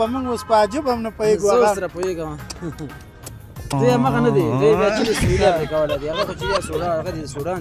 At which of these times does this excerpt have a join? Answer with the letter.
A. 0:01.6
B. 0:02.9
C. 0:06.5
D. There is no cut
D